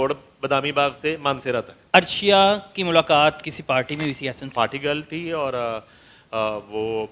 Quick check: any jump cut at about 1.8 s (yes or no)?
yes